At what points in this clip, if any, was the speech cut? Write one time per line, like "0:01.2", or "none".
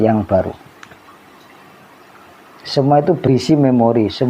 0:03.3